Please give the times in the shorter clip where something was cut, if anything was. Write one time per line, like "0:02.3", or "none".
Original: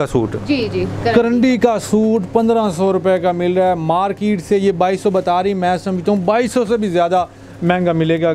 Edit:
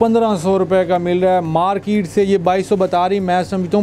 none